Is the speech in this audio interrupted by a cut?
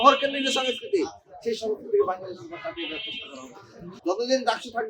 yes; 1 cut; at 3.9 s

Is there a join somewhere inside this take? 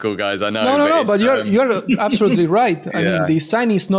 no; 0 cuts

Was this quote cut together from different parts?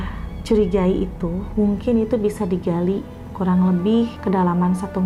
no; 0 cuts

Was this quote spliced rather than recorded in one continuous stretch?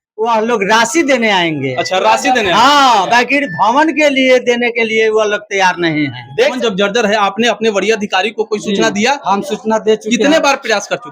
yes; 1 cut; at 6.5 s

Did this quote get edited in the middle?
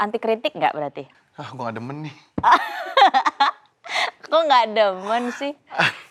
no; 0 cuts

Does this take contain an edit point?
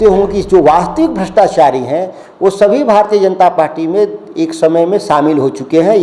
no; 0 cuts

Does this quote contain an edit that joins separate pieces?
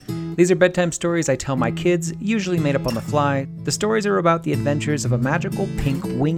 yes; 1 cut; at 3.5 s

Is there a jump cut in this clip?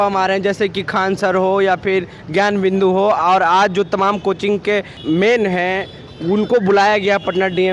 no; 0 cuts

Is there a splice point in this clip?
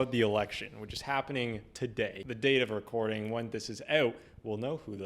yes; 1 cut; at 2.2 s

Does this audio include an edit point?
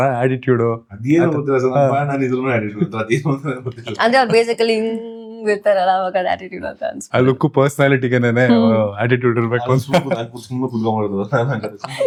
no; 0 cuts

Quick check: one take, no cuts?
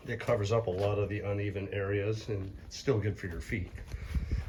yes; 0 cuts

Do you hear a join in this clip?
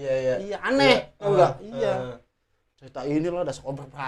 no; 0 cuts

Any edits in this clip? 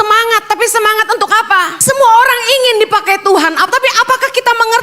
yes; 1 cut; at 1.8 s

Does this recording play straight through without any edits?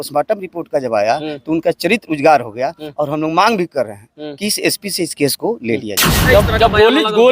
no; 1 cut; at 6.1 s

